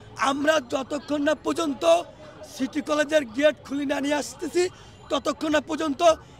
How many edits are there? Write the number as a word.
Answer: zero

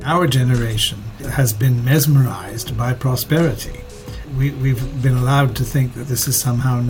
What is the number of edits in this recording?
two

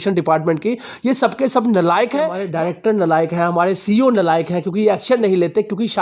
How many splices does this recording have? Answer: one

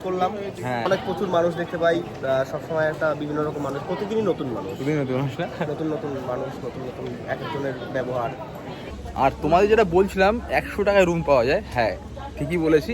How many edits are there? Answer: two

